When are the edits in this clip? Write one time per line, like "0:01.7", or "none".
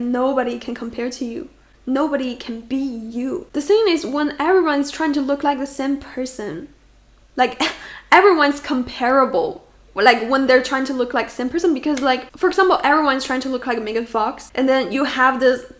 0:01.6